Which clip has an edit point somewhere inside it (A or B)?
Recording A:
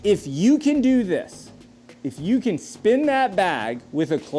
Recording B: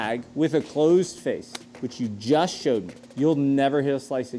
B